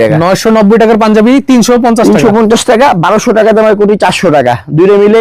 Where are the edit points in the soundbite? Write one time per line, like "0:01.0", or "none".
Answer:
none